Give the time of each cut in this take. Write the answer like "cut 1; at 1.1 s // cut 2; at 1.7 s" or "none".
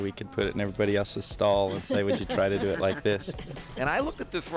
cut 1; at 3.6 s